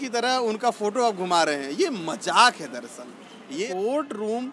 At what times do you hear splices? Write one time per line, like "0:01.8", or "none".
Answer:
0:03.4